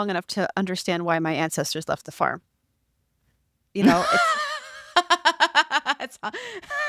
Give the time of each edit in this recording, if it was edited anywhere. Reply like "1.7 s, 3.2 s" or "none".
none